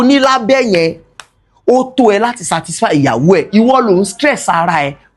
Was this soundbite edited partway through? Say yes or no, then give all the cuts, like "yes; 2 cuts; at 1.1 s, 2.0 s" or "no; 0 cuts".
no; 0 cuts